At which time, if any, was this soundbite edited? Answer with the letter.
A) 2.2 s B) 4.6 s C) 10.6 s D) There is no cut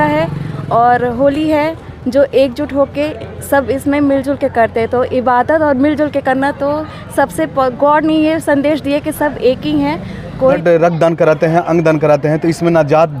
C